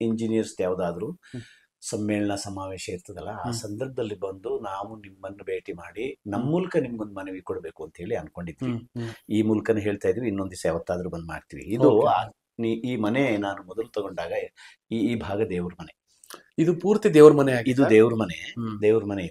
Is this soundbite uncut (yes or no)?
yes